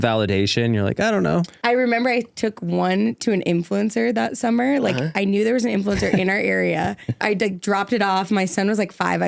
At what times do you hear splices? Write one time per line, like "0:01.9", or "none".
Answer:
0:01.5
0:07.2

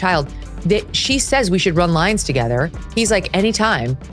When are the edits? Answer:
none

